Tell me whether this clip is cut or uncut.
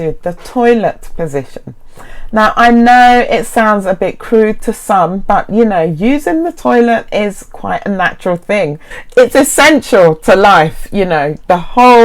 cut